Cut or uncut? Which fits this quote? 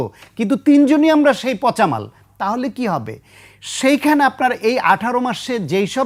uncut